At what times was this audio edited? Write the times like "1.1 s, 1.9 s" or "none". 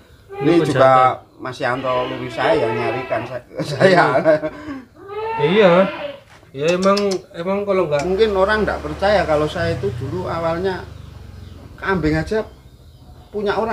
8.0 s